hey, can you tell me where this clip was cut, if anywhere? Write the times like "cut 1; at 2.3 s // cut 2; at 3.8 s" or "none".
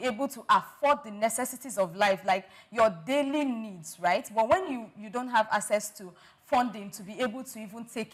none